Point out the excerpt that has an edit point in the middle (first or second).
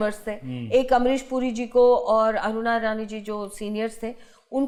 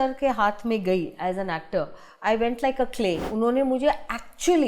second